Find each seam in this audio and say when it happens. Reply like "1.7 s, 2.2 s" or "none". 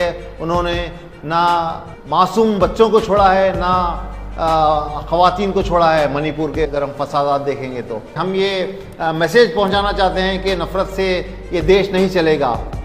8.2 s